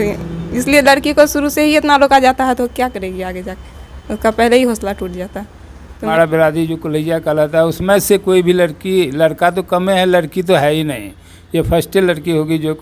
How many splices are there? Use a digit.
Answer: 1